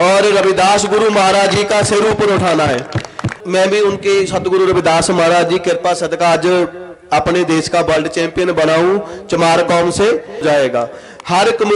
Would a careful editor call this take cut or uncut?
cut